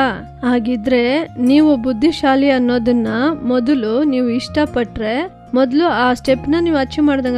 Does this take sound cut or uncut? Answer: cut